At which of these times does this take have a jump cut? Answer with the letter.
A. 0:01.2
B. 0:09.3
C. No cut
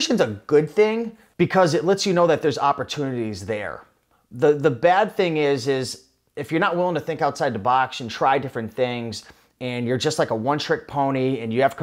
A